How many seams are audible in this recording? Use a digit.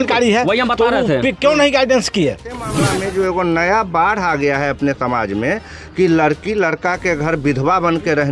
1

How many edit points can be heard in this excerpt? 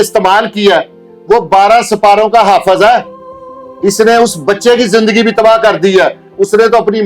0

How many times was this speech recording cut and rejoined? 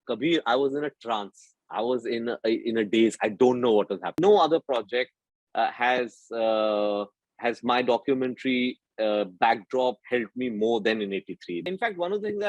2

